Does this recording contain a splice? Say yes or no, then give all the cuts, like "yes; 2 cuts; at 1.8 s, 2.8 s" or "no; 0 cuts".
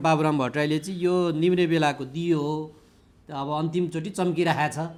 no; 0 cuts